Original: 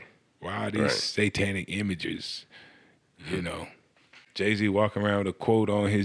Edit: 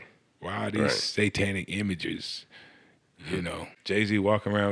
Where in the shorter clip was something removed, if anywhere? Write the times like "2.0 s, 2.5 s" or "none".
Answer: 3.7 s